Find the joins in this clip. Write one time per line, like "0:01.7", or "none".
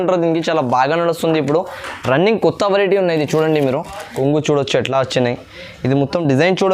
0:04.0